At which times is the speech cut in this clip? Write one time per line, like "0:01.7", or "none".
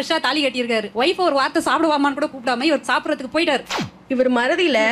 0:03.9